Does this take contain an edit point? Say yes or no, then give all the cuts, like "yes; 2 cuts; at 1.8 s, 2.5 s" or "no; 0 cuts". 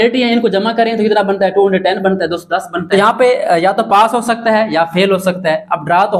yes; 1 cut; at 2.8 s